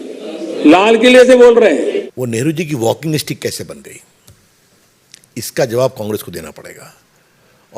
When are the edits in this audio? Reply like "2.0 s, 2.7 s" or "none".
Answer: 2.0 s